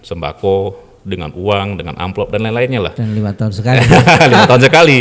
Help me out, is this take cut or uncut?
uncut